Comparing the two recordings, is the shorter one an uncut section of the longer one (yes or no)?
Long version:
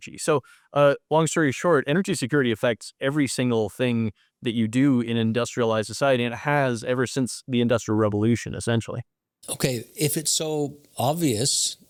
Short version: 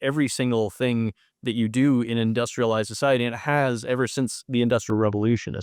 yes